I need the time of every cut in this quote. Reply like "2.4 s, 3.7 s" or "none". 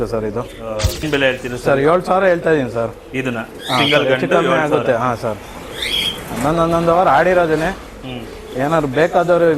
1.0 s

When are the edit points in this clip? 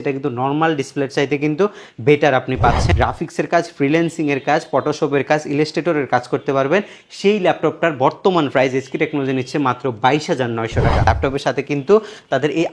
2.9 s, 11.1 s

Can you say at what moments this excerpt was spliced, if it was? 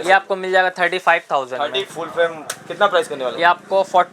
1.9 s

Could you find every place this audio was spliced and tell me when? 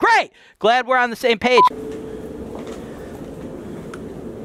1.7 s

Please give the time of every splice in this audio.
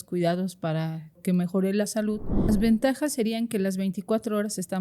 1.2 s, 2.5 s

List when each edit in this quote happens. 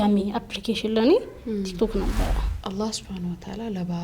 2.5 s

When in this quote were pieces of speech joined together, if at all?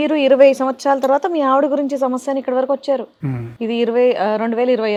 none

